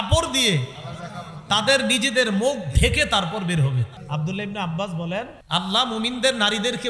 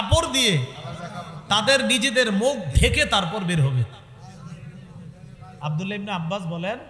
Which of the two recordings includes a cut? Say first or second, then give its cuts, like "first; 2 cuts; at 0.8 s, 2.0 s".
first; 2 cuts; at 3.9 s, 5.4 s